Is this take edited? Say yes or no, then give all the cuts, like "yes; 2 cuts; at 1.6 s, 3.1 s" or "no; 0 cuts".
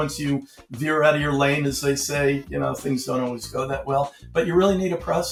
no; 0 cuts